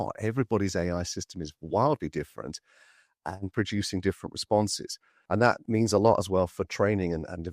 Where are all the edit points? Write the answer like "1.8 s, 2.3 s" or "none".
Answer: 5.5 s

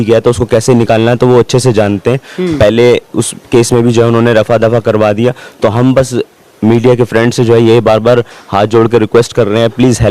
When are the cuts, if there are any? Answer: none

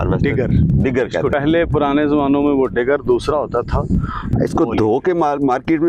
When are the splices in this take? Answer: 1.3 s, 4.3 s

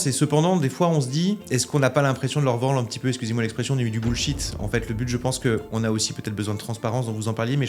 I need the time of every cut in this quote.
1.4 s

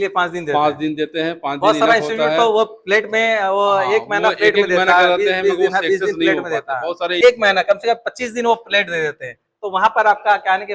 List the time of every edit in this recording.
7.2 s

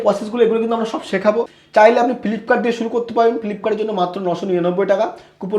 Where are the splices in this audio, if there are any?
1.6 s

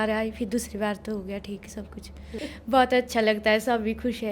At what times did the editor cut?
2.2 s

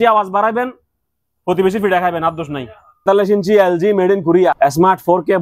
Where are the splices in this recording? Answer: 3.0 s, 4.6 s

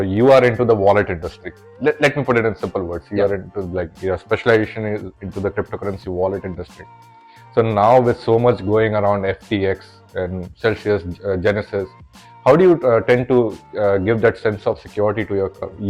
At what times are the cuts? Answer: none

